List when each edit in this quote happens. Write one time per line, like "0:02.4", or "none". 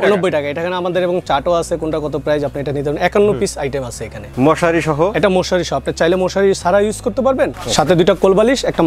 0:04.2
0:07.6